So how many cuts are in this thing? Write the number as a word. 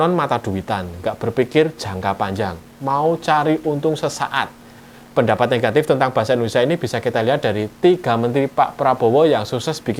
zero